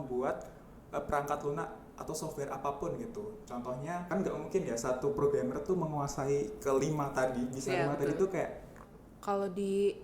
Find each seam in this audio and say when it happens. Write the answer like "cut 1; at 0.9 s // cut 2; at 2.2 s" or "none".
cut 1; at 4.1 s // cut 2; at 8.7 s